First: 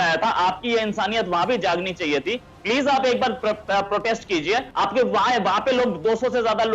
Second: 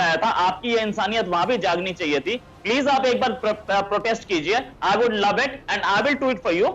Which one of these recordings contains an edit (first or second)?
first